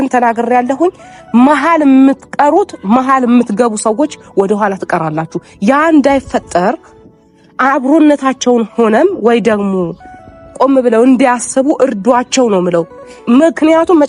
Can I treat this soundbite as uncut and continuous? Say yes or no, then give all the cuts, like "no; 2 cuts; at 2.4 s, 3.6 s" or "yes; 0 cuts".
yes; 0 cuts